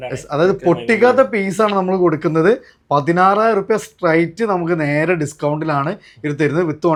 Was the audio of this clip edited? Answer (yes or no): no